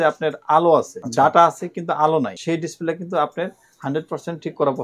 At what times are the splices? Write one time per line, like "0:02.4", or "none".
0:01.0
0:02.4